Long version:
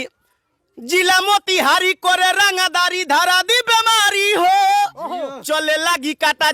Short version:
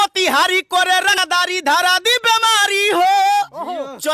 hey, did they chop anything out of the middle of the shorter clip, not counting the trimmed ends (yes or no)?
yes